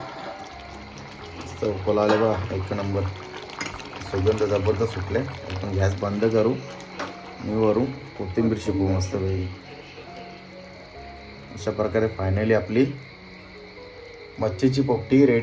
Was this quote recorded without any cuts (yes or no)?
yes